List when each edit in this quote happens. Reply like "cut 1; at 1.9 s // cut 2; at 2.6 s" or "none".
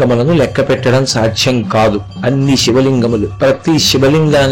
cut 1; at 2.1 s // cut 2; at 3.3 s